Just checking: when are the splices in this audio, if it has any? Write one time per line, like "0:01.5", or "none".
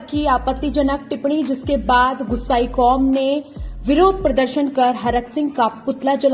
none